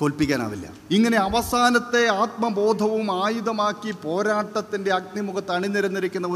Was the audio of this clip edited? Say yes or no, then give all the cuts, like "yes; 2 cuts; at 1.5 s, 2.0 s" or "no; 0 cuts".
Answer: yes; 1 cut; at 0.9 s